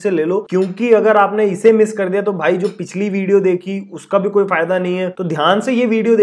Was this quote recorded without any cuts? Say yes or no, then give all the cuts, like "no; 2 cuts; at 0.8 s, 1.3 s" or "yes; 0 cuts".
no; 1 cut; at 5.1 s